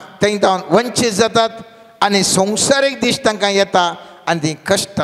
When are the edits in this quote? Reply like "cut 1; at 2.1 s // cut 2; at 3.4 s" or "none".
none